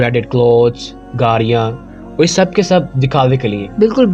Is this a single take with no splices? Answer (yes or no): yes